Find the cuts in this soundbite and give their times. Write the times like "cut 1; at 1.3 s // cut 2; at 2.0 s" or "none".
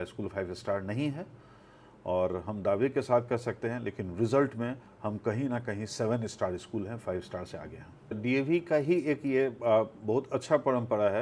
cut 1; at 8.2 s